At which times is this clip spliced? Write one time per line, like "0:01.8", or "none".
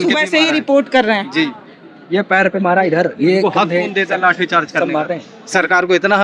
none